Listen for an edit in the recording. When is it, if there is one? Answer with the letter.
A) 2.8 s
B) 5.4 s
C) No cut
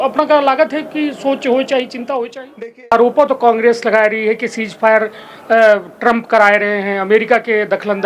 A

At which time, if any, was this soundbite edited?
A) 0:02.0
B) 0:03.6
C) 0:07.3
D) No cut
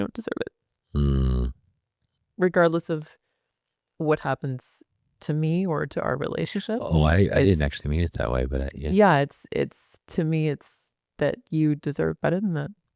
A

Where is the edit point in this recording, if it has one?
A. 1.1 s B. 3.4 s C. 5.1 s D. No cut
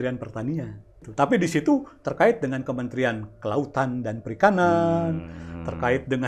A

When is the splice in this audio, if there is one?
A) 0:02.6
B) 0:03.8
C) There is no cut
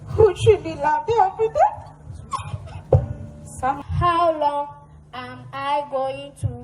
B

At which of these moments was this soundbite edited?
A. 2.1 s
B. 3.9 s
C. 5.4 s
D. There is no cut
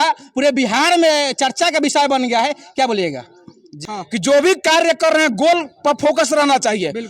B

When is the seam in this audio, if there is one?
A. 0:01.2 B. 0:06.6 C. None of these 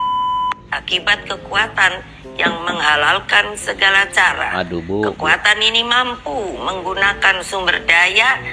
C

